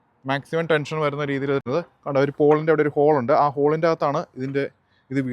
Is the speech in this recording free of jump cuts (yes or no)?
no